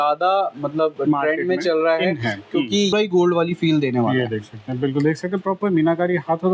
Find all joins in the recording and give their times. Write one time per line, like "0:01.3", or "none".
0:02.9